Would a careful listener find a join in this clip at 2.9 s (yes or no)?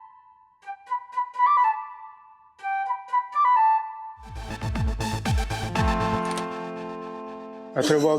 no